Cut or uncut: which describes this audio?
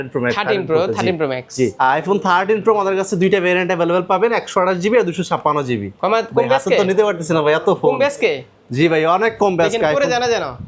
uncut